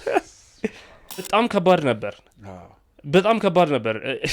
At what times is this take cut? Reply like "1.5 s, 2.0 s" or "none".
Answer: 1.3 s